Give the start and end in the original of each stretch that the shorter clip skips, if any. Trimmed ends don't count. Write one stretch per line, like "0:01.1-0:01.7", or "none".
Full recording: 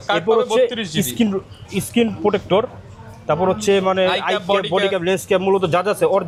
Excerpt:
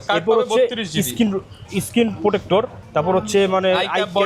0:02.8-0:03.1